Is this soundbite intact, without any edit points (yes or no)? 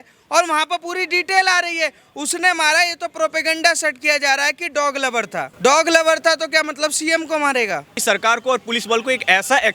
no